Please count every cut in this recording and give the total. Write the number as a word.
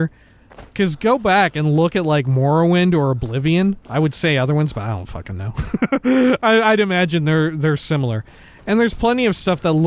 one